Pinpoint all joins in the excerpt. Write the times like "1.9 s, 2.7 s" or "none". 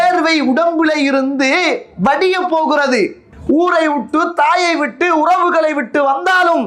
3.3 s